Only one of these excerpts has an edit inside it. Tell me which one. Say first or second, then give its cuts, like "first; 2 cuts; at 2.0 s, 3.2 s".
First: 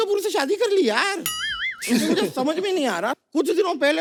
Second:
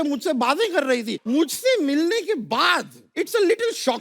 second; 2 cuts; at 1.2 s, 3.1 s